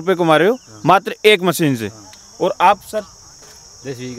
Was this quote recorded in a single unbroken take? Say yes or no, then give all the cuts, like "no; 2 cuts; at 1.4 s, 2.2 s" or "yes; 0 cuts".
yes; 0 cuts